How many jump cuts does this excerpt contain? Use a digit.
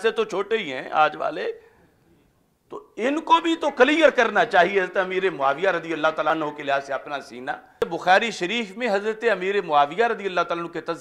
2